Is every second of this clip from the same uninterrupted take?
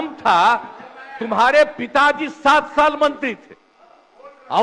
yes; 0 cuts

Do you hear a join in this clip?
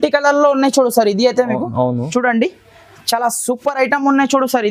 no; 0 cuts

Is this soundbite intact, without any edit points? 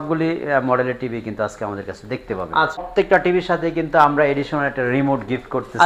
no; 1 cut; at 2.9 s

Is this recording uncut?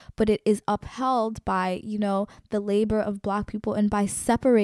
yes; 0 cuts

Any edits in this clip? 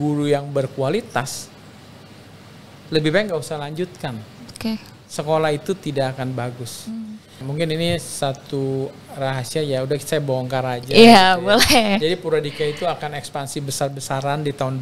yes; 1 cut; at 7.4 s

